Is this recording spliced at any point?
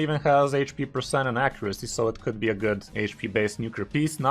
yes; 1 cut; at 2.9 s

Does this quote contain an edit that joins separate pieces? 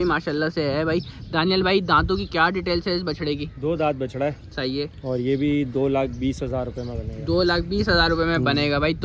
no; 0 cuts

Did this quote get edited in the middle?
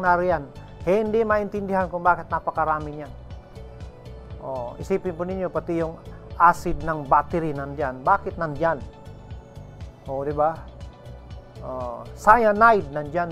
no; 0 cuts

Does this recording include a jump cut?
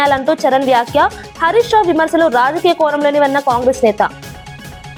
no; 0 cuts

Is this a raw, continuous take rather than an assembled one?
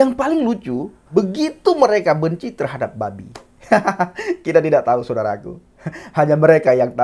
no; 1 cut; at 0.9 s

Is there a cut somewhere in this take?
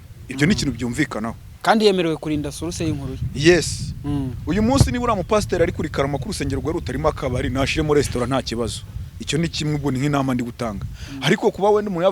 no; 0 cuts

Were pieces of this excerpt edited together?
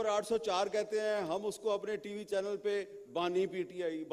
no; 0 cuts

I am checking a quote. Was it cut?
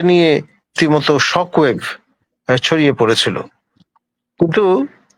no; 0 cuts

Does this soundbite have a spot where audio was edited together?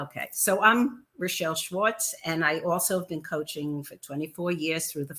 no; 0 cuts

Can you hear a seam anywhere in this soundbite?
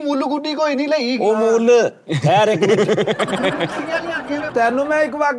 yes; 1 cut; at 4.0 s

